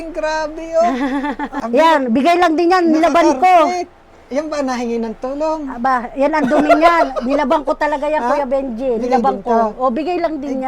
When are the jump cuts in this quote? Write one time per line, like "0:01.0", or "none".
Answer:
0:01.5